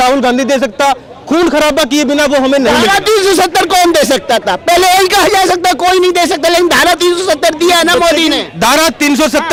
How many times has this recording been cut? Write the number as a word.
zero